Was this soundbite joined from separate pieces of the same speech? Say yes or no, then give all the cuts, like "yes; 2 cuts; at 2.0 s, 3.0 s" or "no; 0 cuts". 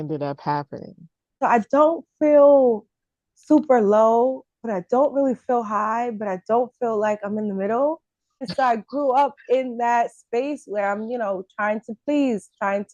yes; 2 cuts; at 1.3 s, 8.5 s